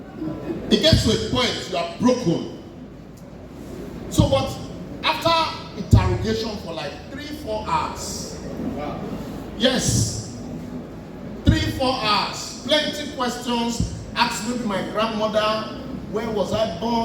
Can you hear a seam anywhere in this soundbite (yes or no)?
no